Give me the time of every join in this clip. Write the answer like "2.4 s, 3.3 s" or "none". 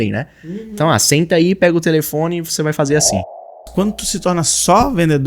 3.3 s